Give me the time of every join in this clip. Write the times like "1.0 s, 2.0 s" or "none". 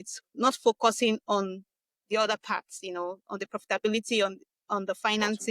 none